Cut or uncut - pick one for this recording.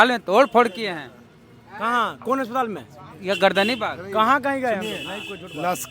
uncut